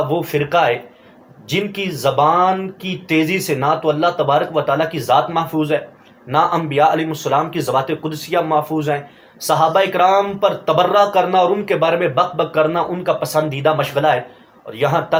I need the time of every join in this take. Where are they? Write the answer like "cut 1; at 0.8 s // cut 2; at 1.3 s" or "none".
none